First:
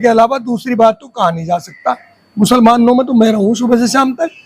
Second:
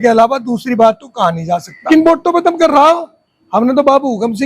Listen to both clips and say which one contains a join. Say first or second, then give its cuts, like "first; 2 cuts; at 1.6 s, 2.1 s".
second; 1 cut; at 1.8 s